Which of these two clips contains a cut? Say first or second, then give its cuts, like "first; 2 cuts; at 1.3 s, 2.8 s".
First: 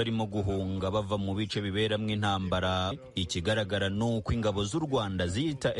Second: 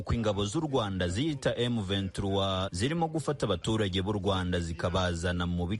first; 1 cut; at 3.0 s